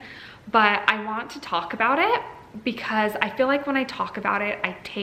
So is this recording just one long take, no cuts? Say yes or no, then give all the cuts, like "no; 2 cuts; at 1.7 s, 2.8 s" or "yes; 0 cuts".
yes; 0 cuts